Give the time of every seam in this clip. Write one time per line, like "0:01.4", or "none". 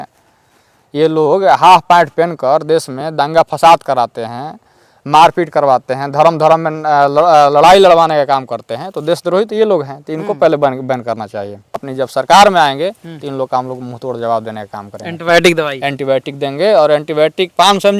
0:11.8